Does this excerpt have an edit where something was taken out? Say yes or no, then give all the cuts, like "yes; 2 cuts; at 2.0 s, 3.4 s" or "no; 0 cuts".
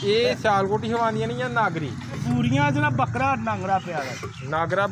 yes; 1 cut; at 2.2 s